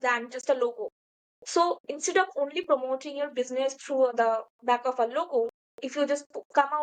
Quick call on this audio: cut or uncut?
cut